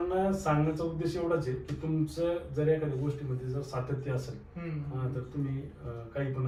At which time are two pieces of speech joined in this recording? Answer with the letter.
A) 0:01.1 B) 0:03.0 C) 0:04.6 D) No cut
D